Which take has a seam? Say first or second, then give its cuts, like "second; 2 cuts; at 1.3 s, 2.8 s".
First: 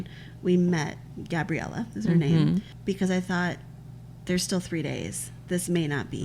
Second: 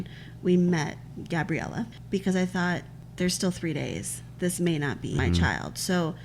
second; 3 cuts; at 1.9 s, 3.0 s, 5.2 s